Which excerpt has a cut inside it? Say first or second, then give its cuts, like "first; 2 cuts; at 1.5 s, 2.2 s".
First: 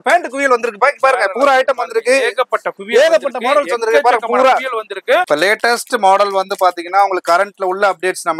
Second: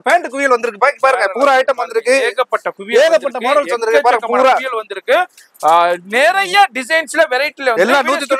first; 1 cut; at 5.2 s